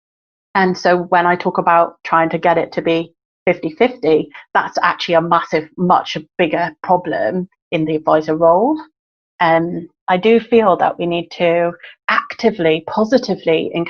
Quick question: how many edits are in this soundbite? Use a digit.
2